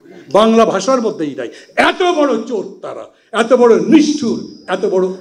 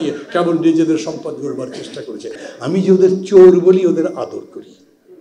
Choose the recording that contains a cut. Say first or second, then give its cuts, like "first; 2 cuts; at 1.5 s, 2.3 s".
second; 1 cut; at 2.4 s